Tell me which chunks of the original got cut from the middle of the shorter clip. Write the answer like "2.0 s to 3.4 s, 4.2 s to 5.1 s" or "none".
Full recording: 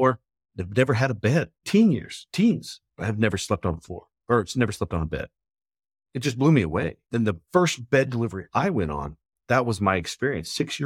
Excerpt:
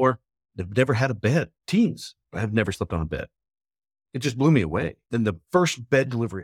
1.6 s to 2.2 s, 3.4 s to 4.8 s